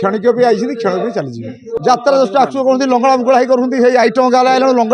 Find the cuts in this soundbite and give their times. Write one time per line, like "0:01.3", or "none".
0:01.8